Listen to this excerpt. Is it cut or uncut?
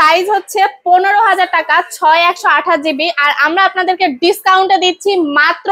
uncut